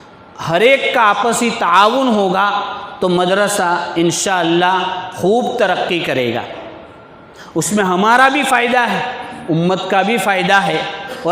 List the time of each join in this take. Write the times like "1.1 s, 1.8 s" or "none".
none